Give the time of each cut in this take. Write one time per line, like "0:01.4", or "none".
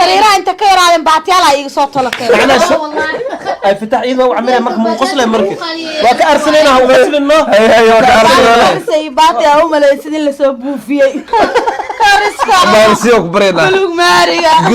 0:11.3